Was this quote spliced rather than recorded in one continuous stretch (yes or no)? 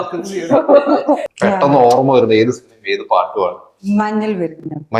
yes